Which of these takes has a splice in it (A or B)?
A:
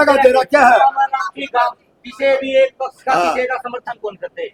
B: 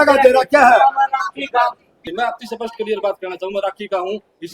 B